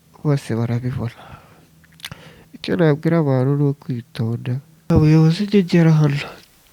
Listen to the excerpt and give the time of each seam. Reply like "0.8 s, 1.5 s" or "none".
4.9 s